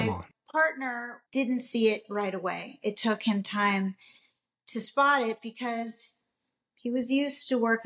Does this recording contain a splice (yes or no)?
yes